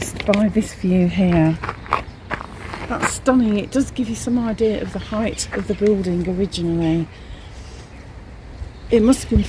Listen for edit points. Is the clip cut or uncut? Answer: uncut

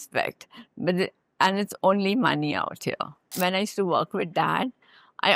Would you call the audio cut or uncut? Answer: cut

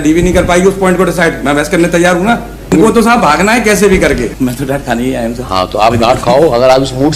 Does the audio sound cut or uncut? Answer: cut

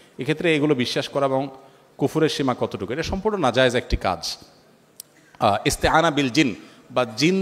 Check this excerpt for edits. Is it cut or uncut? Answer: uncut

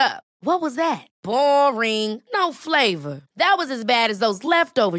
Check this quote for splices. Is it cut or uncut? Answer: uncut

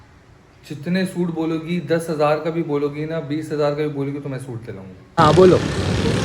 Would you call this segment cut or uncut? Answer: cut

